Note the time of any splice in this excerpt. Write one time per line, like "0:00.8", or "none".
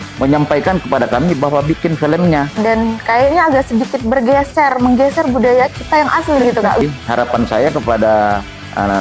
0:02.6
0:06.8

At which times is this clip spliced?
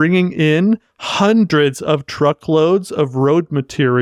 none

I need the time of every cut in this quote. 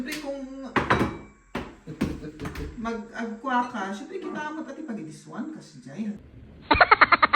0:06.3

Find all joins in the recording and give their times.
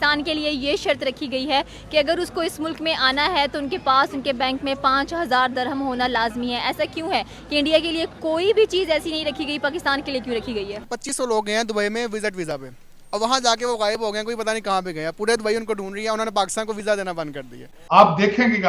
0:10.9
0:17.7

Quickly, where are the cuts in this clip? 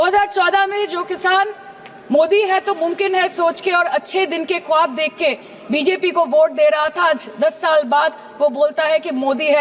none

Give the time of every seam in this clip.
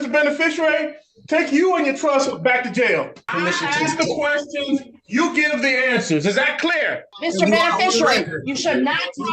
0:03.3
0:07.1

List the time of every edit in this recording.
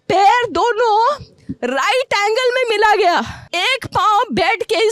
0:03.4

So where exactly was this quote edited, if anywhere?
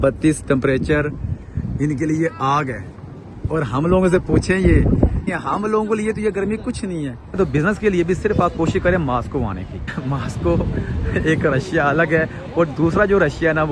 0:05.4
0:07.4
0:10.0

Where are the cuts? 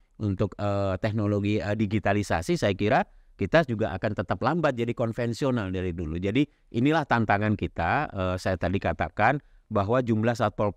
none

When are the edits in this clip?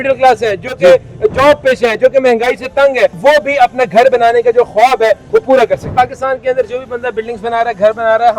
0:03.2
0:05.9

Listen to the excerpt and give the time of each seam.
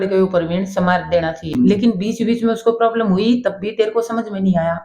0:01.5

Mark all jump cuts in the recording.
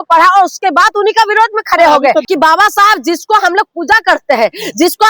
0:02.2

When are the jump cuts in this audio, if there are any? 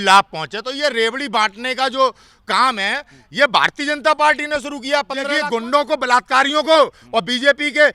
0:05.3

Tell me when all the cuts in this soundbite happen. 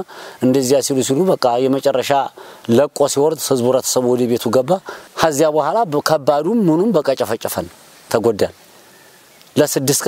0:05.0

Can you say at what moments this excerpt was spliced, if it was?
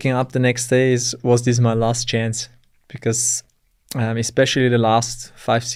none

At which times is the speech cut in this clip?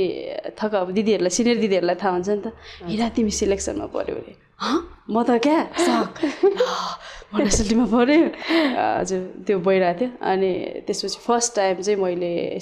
none

